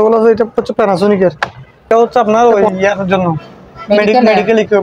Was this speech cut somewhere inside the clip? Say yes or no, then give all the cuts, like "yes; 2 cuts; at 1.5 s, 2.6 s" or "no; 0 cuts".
yes; 1 cut; at 1.9 s